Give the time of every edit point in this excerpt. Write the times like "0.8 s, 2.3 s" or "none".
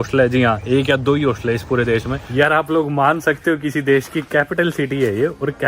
2.2 s